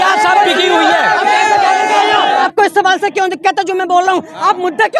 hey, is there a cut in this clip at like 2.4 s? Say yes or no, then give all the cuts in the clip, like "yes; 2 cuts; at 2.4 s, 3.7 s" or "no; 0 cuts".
yes; 1 cut; at 2.4 s